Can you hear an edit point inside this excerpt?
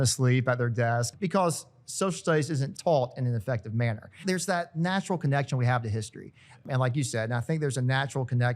yes; 4 cuts; at 1.1 s, 2.7 s, 4.2 s, 6.6 s

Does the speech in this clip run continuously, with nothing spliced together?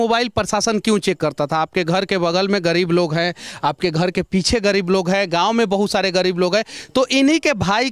yes; 0 cuts

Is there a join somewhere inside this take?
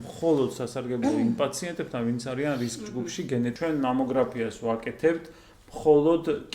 yes; 1 cut; at 3.5 s

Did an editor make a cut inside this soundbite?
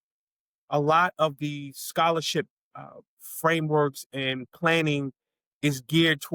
no; 0 cuts

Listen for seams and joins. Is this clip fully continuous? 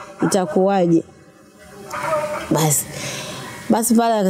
yes; 0 cuts

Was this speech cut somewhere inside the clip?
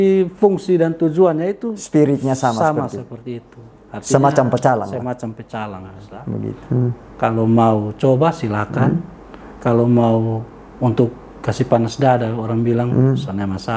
yes; 1 cut; at 6.5 s

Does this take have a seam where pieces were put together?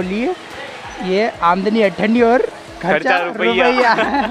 no; 0 cuts

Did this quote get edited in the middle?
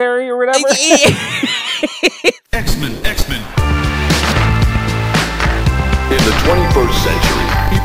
yes; 1 cut; at 2.5 s

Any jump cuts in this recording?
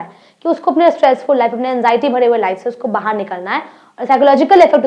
no; 0 cuts

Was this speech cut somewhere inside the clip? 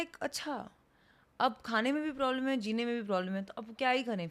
no; 0 cuts

